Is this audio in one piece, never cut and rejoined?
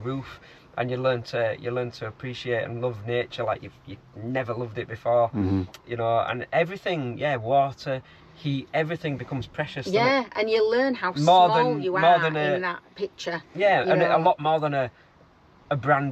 yes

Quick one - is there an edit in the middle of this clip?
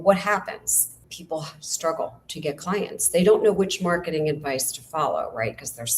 yes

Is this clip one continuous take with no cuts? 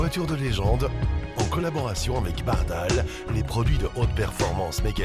yes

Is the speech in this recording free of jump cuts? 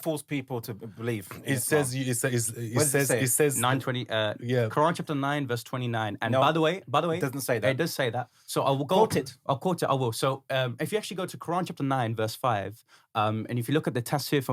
yes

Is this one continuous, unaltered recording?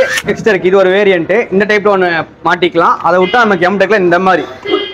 yes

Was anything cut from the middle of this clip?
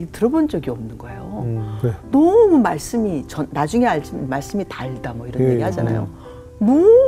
no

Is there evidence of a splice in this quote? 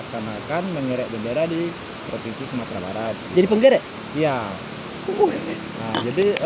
no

